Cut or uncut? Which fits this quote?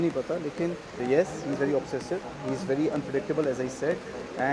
cut